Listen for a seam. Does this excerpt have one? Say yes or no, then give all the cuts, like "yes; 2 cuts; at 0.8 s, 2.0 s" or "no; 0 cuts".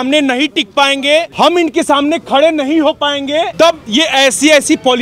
yes; 2 cuts; at 1.3 s, 3.7 s